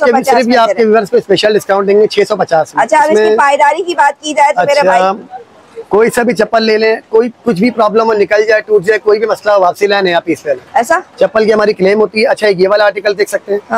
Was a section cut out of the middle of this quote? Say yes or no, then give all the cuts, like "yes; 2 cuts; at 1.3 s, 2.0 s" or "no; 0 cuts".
no; 0 cuts